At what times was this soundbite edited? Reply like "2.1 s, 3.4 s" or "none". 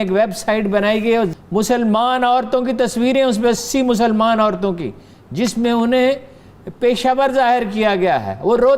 1.3 s